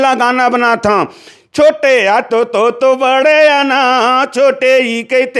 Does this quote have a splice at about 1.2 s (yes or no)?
no